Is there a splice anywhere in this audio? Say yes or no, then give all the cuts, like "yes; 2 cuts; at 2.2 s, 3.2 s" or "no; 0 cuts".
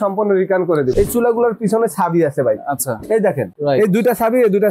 yes; 2 cuts; at 0.9 s, 3.5 s